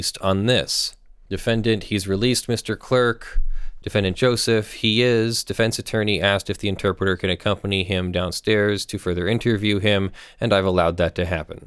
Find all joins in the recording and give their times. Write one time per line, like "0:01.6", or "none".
none